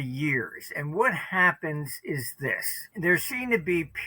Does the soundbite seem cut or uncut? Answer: cut